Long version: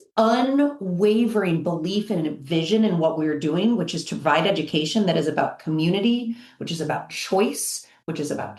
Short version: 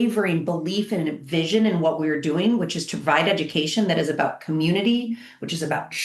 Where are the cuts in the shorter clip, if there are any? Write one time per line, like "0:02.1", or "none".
none